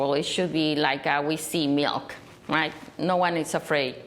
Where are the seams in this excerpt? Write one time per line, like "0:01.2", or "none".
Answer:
none